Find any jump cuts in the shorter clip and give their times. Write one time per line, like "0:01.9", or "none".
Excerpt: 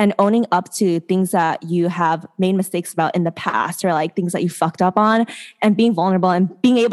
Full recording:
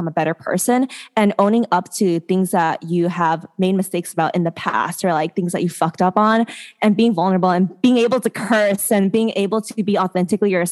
none